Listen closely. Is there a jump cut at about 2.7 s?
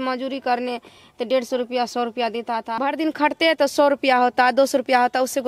yes; 1 cut; at 2.7 s

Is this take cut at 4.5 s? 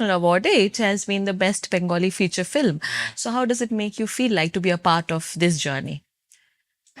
no; 0 cuts

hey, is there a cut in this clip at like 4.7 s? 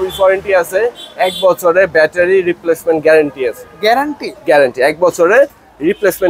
no; 0 cuts

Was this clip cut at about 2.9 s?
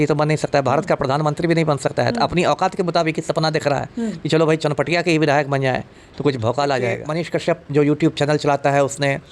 no; 1 cut; at 7.0 s

